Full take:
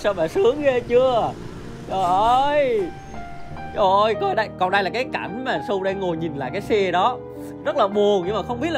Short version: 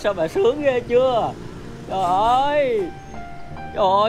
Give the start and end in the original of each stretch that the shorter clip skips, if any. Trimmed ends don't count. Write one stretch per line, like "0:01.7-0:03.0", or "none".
none